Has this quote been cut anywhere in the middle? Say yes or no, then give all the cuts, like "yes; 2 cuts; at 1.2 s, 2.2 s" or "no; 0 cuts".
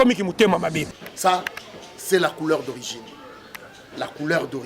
yes; 1 cut; at 1.1 s